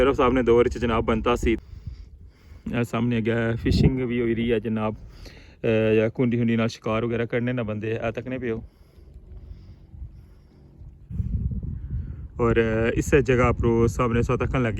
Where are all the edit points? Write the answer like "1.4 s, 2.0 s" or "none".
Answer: 1.6 s, 11.0 s